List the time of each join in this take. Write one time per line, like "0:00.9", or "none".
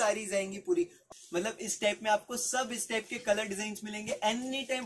0:01.0